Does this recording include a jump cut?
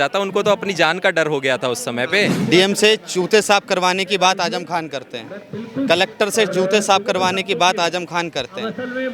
yes; 1 cut; at 2.4 s

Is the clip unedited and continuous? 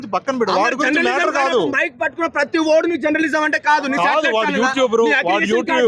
yes; 0 cuts

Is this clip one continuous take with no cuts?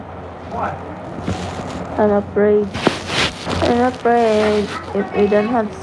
no; 1 cut; at 3.4 s

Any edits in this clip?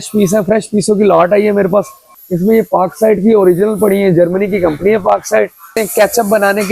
yes; 2 cuts; at 2.1 s, 5.7 s

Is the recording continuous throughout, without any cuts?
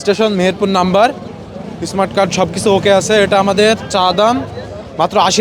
yes; 0 cuts

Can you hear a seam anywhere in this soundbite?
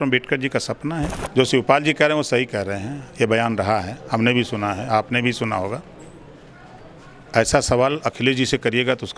yes; 1 cut; at 1.2 s

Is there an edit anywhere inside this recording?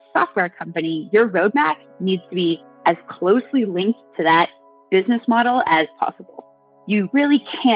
yes; 1 cut; at 2.7 s

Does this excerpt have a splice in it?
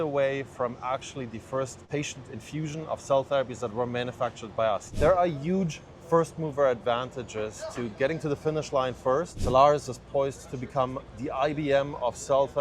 yes; 3 cuts; at 1.9 s, 4.9 s, 9.4 s

